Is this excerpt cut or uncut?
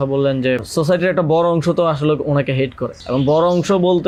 uncut